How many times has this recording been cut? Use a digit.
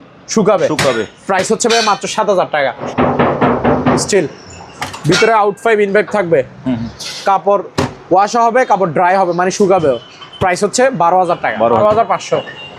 2